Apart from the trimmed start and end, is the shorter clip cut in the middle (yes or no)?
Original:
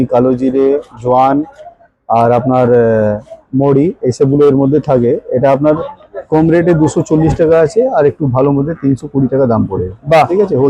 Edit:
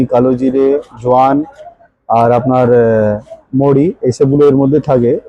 no